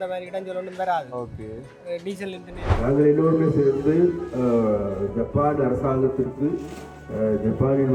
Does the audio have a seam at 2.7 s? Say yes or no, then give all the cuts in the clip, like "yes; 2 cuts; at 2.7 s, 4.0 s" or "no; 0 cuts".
yes; 1 cut; at 2.7 s